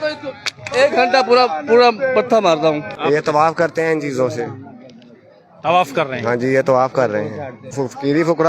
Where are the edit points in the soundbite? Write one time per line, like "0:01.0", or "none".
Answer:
0:02.9
0:07.7